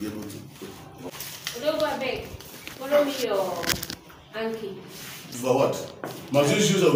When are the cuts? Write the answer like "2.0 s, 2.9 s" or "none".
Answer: 1.1 s